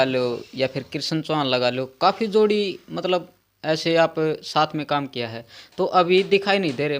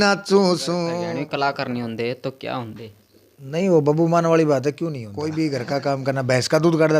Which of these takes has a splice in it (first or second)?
second